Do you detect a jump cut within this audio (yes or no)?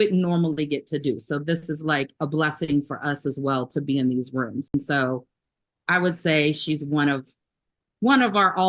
yes